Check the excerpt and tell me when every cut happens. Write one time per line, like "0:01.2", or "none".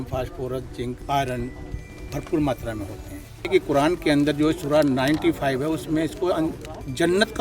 0:01.0
0:03.5

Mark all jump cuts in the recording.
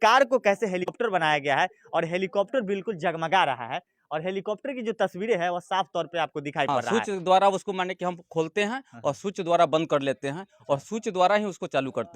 0:00.9
0:06.7

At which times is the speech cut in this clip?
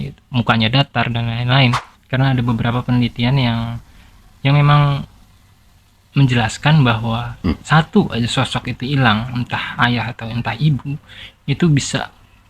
0:01.9

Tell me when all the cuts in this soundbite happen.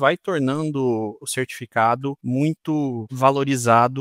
0:01.2
0:02.2
0:03.1

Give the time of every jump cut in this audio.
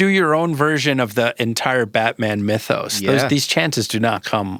none

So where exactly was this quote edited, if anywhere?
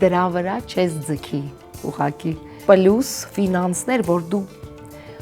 0:02.5

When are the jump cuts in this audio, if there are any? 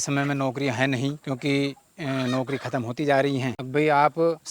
0:01.2
0:03.6

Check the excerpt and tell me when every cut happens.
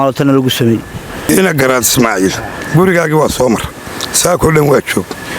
0:01.3

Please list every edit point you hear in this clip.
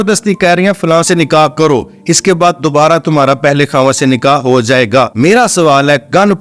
0:05.1

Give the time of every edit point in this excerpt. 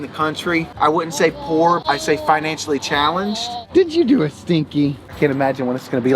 0:01.8
0:03.5
0:05.0

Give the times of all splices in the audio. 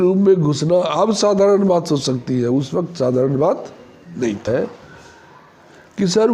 0:04.5

